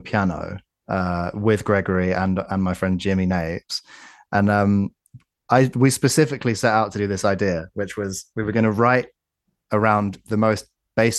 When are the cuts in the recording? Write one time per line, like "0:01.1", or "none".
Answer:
none